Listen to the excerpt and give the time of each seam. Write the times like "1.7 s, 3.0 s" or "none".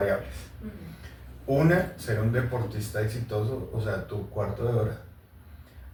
none